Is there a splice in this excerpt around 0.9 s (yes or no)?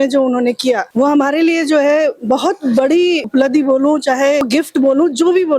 yes